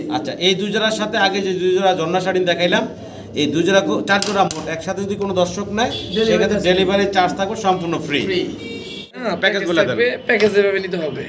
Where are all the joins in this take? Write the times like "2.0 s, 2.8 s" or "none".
9.2 s